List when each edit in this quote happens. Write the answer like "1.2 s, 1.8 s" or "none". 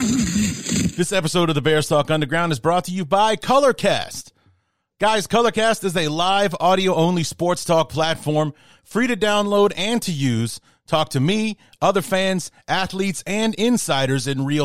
0.9 s